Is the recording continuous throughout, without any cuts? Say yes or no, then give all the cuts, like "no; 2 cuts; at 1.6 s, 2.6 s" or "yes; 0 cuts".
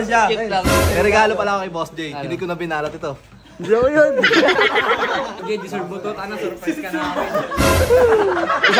no; 1 cut; at 5.4 s